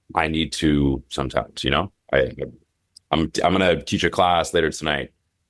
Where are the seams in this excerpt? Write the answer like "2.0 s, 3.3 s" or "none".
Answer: none